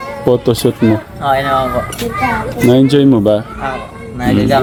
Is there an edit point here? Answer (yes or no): no